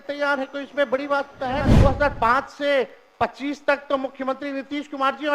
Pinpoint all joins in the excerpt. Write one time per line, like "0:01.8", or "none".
0:01.7